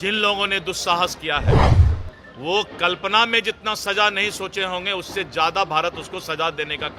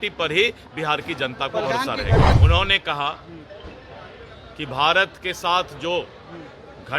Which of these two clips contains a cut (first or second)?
second